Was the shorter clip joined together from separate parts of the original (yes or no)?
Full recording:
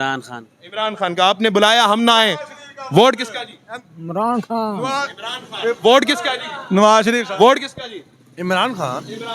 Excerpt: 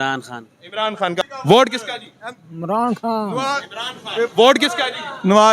yes